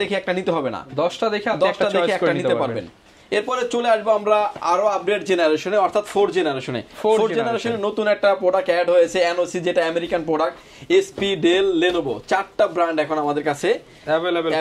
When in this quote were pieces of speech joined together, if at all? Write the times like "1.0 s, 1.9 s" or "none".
none